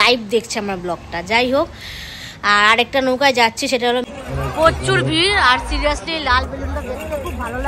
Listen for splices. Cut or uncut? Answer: cut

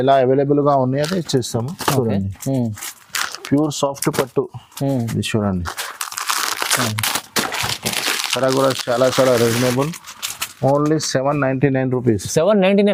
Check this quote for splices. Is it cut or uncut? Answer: uncut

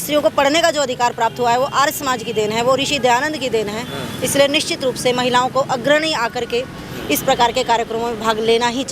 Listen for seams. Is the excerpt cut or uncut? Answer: uncut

